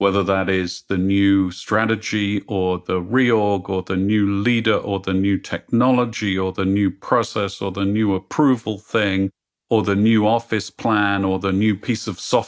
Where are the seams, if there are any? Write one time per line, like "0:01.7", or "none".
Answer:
none

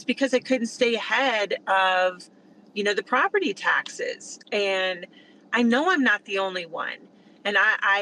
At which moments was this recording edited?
none

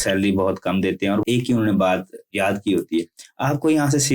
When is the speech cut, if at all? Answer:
0:01.2
0:02.3

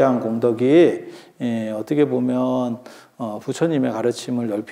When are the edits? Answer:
none

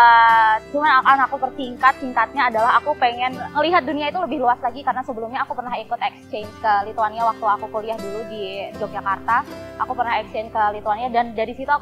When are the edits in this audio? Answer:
0:03.4

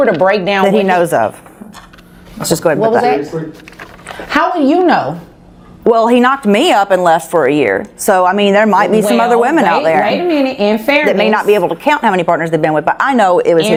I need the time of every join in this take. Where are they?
none

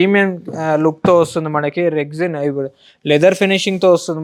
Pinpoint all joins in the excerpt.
none

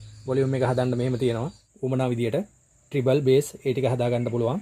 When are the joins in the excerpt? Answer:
0:01.6

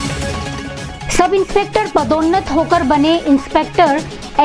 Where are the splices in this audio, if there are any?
0:01.0

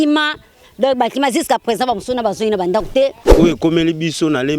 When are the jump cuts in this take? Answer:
0:03.2

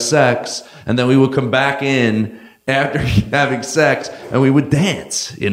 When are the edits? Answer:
0:02.5

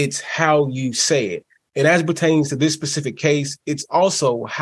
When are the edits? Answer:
none

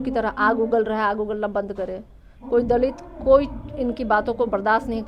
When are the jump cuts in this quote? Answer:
none

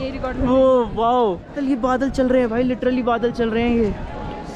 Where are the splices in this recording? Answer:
0:01.6

